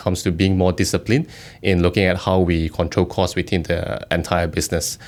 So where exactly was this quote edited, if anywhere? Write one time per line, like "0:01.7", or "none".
none